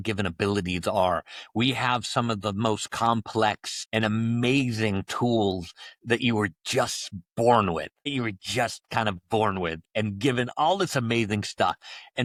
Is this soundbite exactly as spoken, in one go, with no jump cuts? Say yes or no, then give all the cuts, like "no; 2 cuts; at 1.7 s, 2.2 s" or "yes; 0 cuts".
yes; 0 cuts